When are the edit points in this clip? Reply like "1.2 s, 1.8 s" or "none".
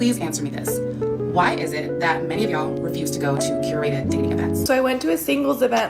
4.6 s